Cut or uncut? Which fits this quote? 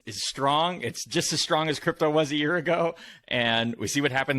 uncut